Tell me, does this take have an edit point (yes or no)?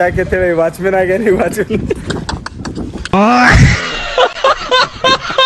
yes